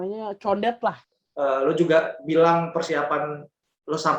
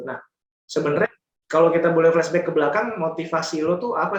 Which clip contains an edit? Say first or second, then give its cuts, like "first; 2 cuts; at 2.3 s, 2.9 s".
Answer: first; 1 cut; at 1.1 s